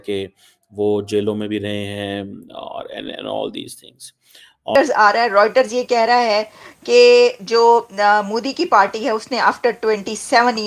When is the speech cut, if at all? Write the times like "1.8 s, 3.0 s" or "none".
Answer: 4.8 s